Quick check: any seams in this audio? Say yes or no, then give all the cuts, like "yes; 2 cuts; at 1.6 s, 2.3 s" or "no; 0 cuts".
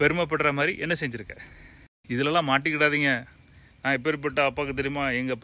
no; 0 cuts